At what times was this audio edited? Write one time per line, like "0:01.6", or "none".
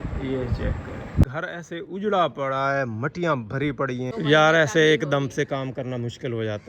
0:01.3
0:04.1